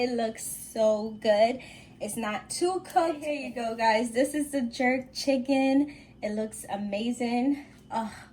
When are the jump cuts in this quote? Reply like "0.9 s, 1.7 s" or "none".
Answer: 3.3 s